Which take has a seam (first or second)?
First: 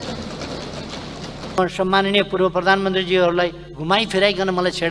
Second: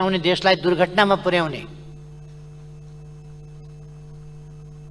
first